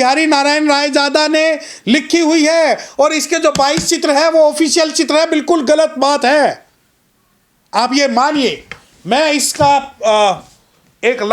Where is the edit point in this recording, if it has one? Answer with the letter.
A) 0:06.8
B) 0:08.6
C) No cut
C